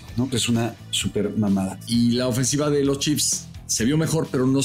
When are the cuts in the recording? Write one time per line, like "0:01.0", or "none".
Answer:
0:01.8